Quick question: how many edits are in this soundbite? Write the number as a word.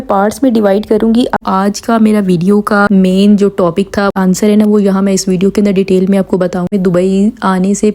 three